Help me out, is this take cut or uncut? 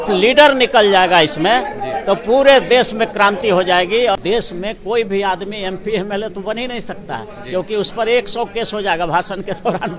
cut